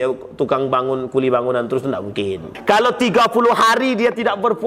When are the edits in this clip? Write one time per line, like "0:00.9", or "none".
0:02.5